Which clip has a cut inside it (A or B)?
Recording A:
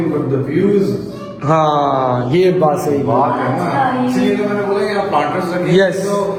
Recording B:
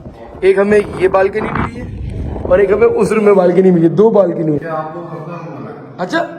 B